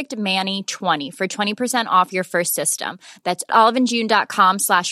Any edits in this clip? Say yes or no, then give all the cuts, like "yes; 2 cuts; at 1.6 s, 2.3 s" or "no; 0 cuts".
yes; 1 cut; at 1.0 s